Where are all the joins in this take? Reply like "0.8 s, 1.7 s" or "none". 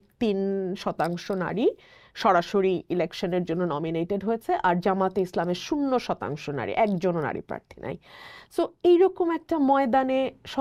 none